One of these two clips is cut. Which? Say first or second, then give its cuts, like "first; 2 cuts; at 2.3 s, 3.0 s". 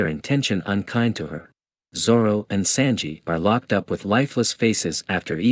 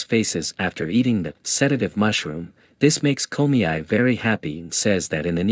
first; 1 cut; at 1.8 s